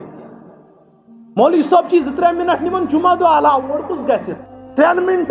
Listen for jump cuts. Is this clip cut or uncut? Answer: cut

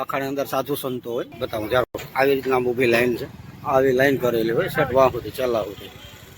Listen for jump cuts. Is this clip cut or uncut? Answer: cut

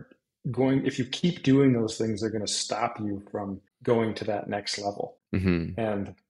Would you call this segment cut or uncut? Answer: cut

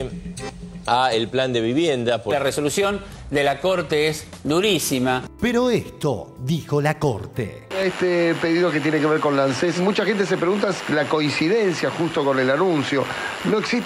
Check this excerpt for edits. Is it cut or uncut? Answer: cut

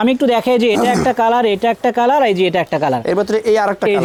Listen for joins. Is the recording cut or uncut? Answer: uncut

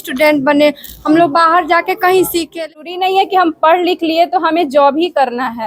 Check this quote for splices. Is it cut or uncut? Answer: cut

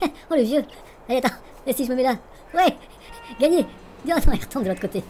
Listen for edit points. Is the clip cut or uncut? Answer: uncut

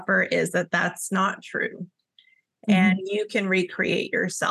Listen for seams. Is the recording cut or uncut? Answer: uncut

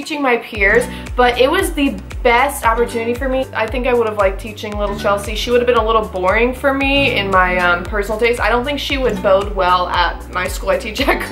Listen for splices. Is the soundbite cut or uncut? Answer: cut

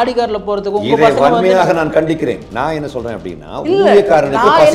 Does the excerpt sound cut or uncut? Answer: uncut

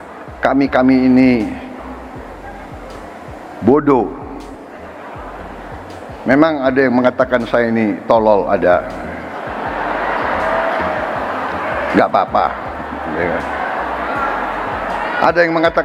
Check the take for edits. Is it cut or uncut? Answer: uncut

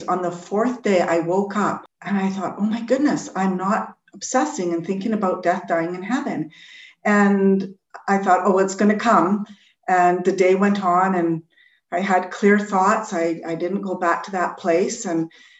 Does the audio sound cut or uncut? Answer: cut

